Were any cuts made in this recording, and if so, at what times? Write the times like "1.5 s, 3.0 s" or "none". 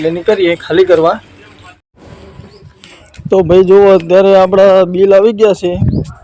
none